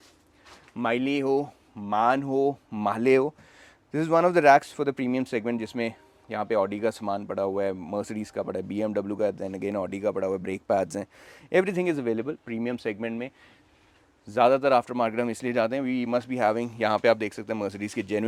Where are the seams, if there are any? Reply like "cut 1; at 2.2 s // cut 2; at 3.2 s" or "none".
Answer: none